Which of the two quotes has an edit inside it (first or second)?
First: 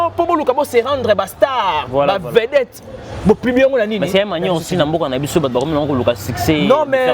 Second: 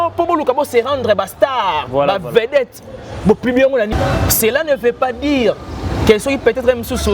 second